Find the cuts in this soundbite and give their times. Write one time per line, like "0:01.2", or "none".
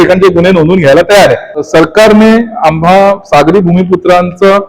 0:01.6